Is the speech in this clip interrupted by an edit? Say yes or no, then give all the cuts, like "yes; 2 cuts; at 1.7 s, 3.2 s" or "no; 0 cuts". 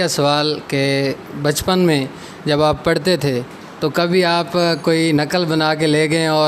no; 0 cuts